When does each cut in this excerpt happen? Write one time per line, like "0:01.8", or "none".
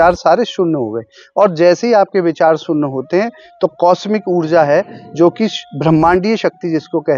none